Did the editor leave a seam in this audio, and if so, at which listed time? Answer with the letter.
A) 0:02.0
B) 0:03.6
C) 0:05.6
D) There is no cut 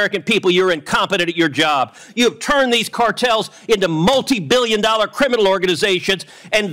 A